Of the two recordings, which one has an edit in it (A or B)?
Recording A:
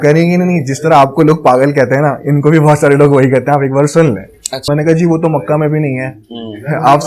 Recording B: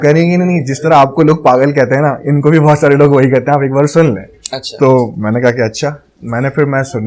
A